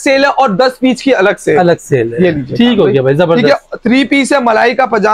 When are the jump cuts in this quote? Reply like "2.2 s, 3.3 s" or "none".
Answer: none